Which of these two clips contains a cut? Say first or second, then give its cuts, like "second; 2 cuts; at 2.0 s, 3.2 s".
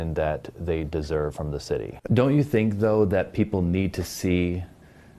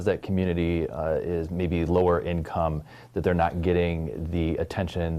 first; 1 cut; at 1.9 s